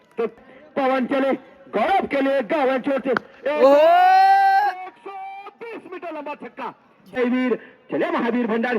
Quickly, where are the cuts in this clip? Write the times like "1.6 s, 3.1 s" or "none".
7.2 s